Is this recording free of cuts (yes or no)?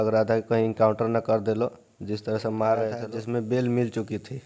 no